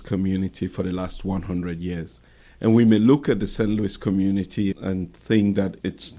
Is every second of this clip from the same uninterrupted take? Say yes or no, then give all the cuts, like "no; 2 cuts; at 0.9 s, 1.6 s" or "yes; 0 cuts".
yes; 0 cuts